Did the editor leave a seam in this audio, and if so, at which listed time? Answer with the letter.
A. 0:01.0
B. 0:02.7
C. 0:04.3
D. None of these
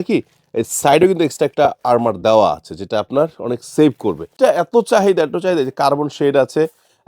C